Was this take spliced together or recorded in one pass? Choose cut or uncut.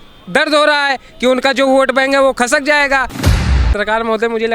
cut